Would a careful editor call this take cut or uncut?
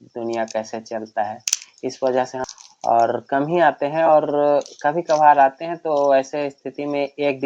cut